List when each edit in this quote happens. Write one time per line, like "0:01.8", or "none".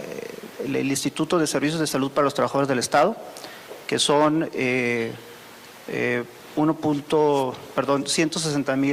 none